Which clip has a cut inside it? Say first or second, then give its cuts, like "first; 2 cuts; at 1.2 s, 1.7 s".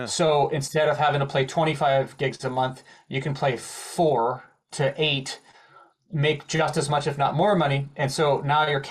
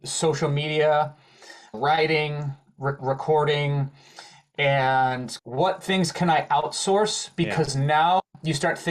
second; 3 cuts; at 1.8 s, 3.0 s, 5.3 s